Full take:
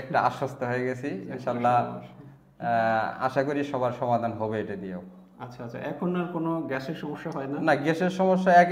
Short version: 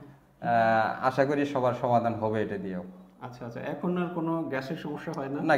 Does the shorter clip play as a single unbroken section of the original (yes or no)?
yes